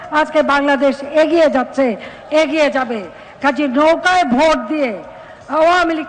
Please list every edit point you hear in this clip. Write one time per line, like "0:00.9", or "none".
none

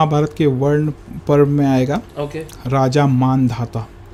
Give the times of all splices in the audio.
none

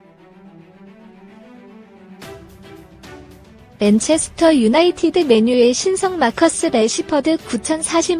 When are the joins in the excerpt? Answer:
0:03.8

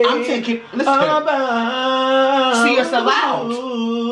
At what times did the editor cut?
none

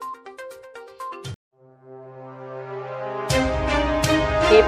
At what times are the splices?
none

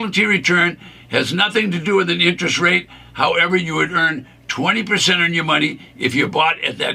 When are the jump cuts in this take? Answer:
none

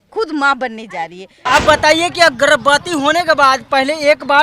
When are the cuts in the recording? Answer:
0:01.3

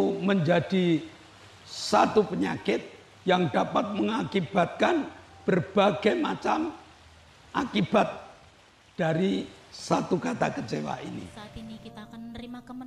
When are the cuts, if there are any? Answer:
0:11.3

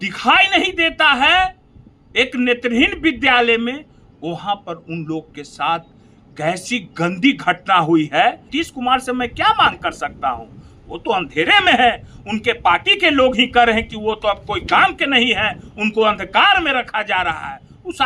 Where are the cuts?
0:08.5

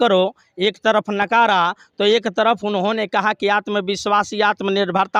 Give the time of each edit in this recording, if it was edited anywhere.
none

